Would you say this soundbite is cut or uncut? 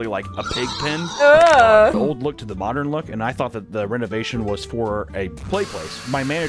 cut